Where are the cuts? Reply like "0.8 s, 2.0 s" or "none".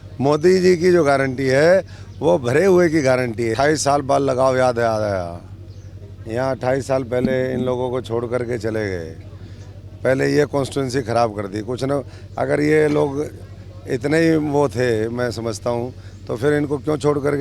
3.5 s

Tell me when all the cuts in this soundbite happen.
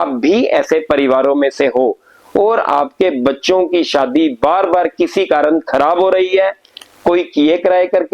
none

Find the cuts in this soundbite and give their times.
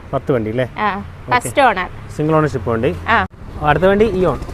3.4 s

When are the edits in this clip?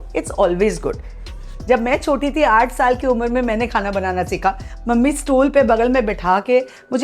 1.5 s

